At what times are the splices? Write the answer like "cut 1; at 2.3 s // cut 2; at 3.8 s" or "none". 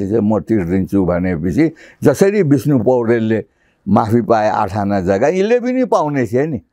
none